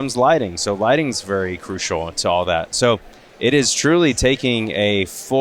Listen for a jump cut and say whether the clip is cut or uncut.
uncut